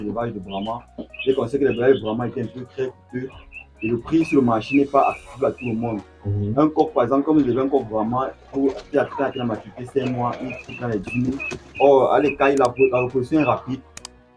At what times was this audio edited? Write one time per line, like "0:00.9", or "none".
none